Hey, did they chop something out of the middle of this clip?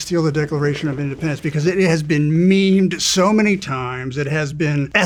no; 0 cuts

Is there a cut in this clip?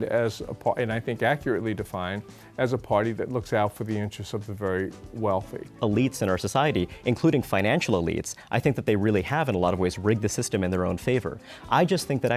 yes; 1 cut; at 5.7 s

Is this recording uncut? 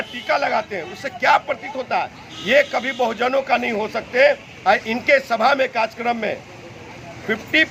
yes; 0 cuts

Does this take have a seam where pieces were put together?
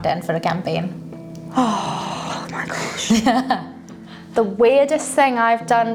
no; 0 cuts

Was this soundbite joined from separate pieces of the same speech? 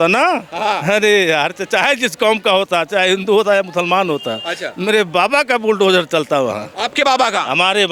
no; 0 cuts

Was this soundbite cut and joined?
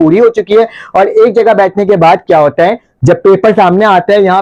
no; 0 cuts

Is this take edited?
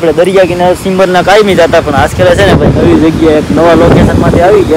no; 0 cuts

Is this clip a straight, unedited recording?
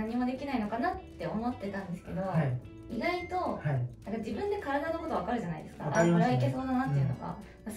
yes; 0 cuts

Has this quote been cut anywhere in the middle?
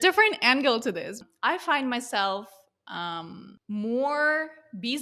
yes; 2 cuts; at 1.2 s, 3.5 s

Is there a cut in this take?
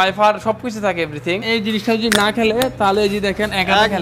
yes; 1 cut; at 1.4 s

